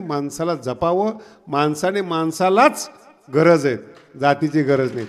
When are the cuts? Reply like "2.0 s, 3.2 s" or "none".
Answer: none

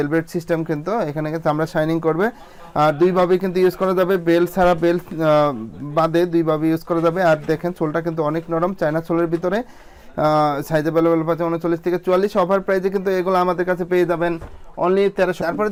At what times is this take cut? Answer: none

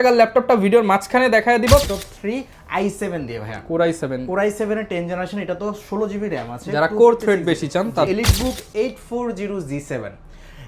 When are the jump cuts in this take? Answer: 1.8 s, 8.1 s

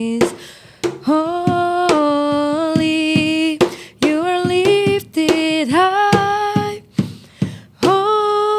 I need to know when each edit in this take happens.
none

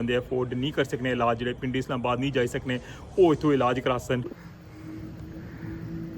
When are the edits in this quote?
4.3 s

